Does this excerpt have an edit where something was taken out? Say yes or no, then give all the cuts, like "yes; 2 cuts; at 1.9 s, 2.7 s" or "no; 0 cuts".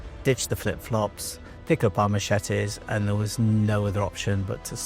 no; 0 cuts